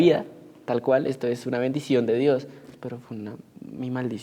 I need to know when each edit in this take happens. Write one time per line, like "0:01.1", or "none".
0:02.8